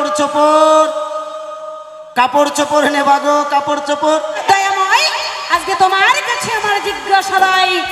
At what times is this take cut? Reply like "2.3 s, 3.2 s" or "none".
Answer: 4.4 s